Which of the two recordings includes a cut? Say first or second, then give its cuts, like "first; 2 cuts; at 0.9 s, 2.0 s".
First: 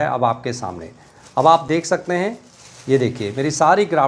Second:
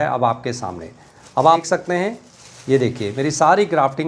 second; 1 cut; at 1.6 s